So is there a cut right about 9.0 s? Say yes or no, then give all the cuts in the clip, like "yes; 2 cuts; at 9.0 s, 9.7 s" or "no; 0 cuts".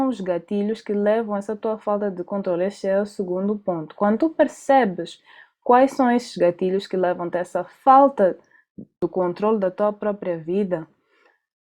yes; 1 cut; at 9.0 s